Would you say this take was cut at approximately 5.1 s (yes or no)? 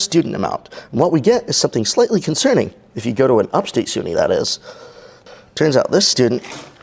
yes